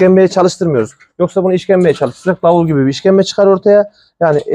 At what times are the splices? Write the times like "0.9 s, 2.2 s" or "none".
none